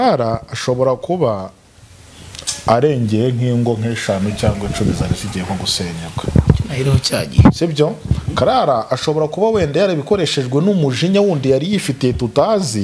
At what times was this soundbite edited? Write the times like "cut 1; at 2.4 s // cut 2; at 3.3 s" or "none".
none